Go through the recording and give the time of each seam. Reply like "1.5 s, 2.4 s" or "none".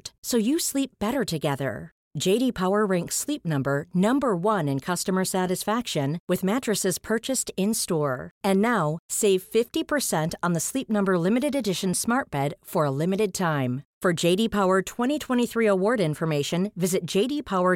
none